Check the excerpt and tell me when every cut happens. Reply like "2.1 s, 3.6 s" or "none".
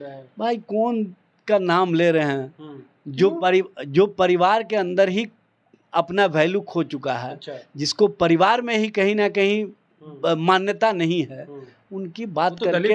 none